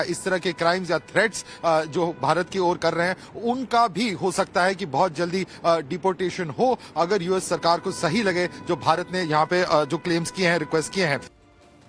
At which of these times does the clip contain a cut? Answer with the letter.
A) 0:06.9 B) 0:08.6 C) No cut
C